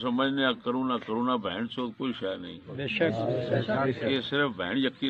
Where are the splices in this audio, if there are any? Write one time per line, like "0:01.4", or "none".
none